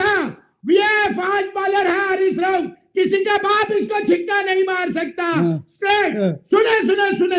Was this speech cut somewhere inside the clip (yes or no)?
no